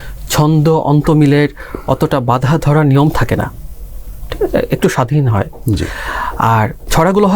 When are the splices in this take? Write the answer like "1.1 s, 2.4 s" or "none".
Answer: none